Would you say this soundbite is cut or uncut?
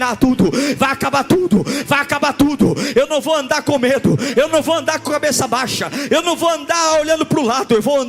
uncut